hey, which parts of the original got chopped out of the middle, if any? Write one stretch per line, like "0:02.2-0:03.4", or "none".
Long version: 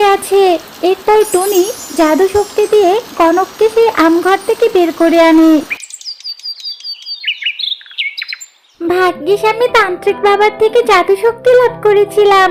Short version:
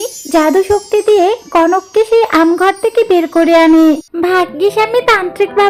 0:05.7-0:08.7